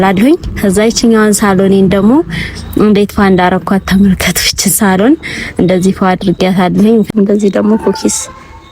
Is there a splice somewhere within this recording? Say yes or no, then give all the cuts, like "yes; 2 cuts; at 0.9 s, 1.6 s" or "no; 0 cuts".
yes; 1 cut; at 7.1 s